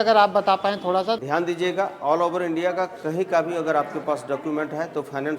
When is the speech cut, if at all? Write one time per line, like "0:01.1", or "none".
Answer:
0:01.2